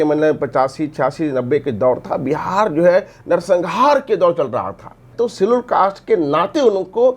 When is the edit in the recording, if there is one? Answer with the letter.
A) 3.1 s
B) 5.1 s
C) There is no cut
B